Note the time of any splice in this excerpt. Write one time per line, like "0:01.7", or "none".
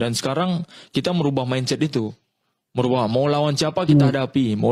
none